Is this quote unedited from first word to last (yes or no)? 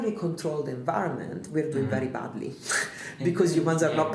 yes